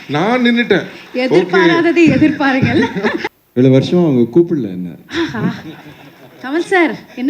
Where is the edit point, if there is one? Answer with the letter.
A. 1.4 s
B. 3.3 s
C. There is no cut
B